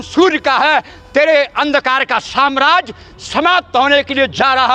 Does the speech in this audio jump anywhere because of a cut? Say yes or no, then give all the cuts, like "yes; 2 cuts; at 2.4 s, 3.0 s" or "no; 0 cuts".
no; 0 cuts